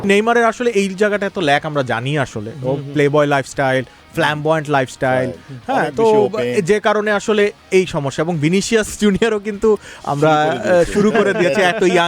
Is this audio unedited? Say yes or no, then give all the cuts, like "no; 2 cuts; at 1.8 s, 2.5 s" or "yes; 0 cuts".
yes; 0 cuts